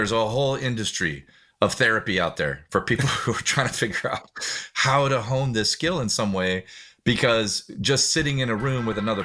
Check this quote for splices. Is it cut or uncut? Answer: uncut